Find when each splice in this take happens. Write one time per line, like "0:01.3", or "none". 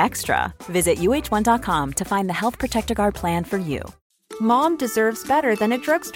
0:04.0